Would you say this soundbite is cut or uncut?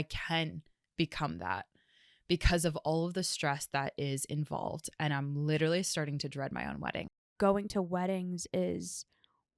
cut